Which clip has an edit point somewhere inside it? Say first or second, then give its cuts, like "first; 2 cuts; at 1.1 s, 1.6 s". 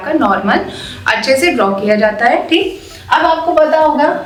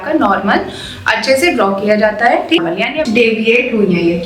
second; 1 cut; at 3.0 s